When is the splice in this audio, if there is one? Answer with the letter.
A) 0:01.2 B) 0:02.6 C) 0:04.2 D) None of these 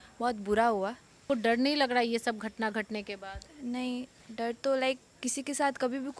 A